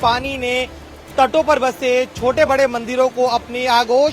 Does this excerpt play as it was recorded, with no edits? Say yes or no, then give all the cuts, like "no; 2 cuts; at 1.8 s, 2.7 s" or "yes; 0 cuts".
yes; 0 cuts